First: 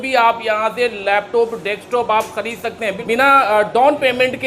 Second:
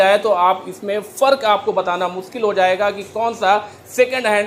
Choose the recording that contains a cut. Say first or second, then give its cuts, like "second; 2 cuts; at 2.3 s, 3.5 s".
first; 1 cut; at 3.0 s